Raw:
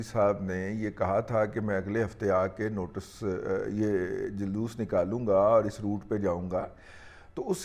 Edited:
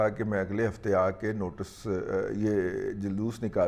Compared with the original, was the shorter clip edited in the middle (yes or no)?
no